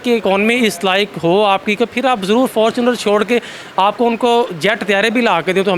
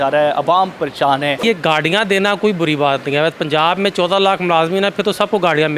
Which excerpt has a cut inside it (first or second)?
second